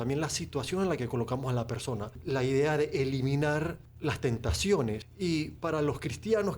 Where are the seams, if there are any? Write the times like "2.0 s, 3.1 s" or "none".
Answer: 2.2 s, 3.8 s, 5.1 s